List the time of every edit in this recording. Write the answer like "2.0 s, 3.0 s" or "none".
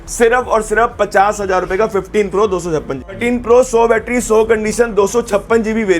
3.2 s